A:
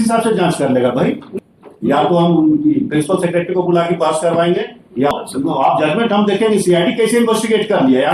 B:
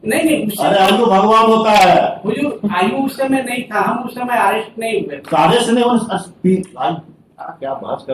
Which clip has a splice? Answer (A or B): A